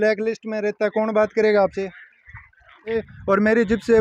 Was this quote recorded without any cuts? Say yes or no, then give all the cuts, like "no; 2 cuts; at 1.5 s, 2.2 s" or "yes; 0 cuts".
no; 1 cut; at 2.9 s